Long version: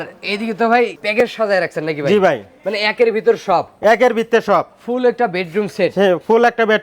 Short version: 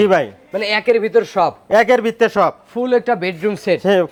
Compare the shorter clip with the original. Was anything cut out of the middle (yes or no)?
no